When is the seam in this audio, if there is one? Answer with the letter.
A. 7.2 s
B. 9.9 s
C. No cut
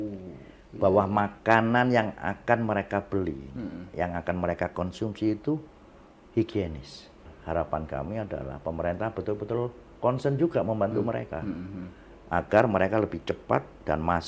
A